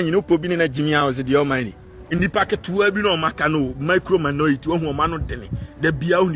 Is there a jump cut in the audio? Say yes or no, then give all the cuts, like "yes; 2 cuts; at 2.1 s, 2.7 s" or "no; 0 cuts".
yes; 1 cut; at 2.0 s